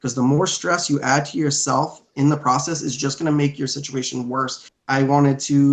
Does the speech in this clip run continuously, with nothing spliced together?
no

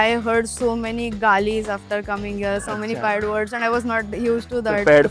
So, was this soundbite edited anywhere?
no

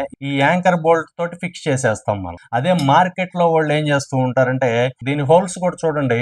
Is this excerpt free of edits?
no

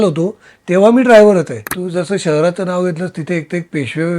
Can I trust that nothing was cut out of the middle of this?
no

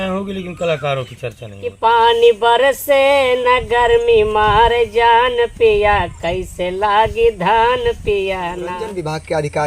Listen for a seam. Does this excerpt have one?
yes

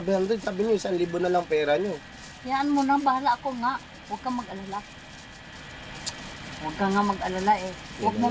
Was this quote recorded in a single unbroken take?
yes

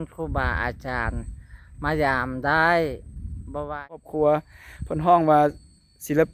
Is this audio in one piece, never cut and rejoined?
no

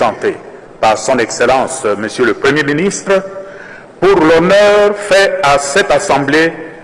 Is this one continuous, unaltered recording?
yes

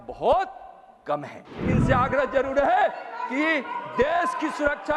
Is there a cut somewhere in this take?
yes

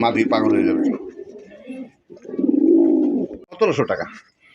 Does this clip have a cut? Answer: yes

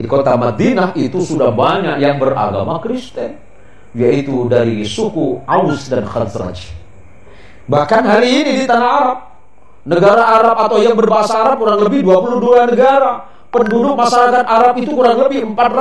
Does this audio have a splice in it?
yes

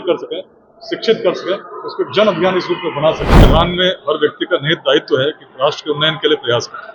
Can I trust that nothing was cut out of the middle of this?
no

